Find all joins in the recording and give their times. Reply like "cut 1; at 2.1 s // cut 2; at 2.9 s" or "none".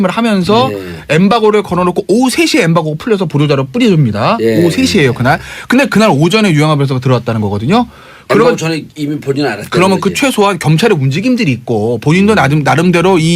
cut 1; at 8.9 s